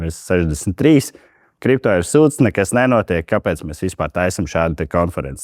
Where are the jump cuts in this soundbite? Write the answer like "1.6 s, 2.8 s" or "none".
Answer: none